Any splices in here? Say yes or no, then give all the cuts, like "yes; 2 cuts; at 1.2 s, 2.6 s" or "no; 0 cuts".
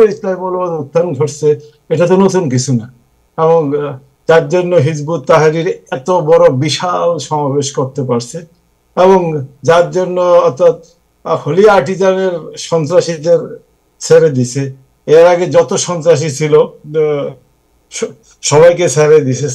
no; 0 cuts